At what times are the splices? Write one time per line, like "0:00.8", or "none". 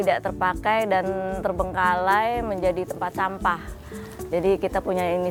none